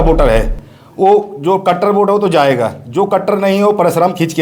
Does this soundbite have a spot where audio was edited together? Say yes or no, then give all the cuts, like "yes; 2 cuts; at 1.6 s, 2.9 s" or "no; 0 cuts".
no; 0 cuts